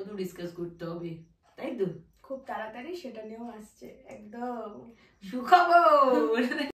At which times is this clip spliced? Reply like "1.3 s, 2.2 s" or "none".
none